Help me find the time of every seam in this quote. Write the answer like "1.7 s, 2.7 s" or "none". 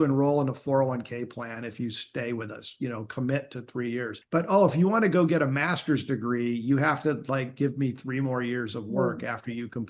4.2 s